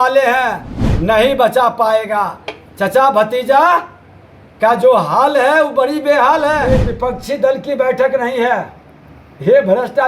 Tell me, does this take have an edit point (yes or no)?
yes